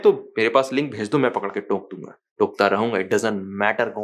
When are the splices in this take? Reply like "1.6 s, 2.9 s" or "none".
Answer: none